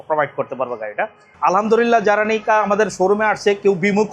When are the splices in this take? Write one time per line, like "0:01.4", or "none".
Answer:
0:01.2